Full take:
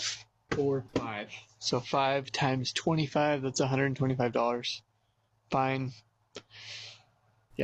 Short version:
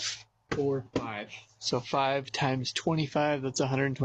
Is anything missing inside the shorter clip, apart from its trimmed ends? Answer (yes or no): no